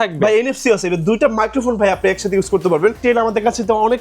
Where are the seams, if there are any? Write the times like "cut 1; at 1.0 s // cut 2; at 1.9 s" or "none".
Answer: cut 1; at 3.0 s